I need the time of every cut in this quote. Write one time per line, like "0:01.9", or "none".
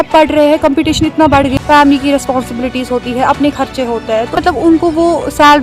0:01.6
0:04.4